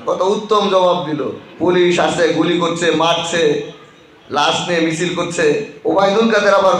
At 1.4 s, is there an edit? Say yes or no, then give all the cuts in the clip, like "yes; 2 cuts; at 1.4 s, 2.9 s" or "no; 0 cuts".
yes; 2 cuts; at 1.4 s, 5.7 s